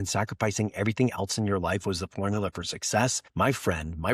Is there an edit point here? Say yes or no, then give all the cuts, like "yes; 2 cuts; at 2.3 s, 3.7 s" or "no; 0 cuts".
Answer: yes; 1 cut; at 3.2 s